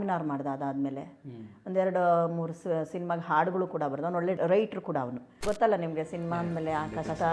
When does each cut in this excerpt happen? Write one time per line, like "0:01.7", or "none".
0:05.4